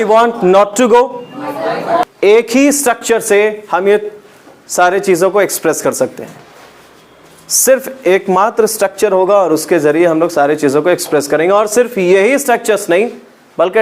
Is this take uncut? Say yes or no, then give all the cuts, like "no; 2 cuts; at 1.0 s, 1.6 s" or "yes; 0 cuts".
no; 1 cut; at 2.0 s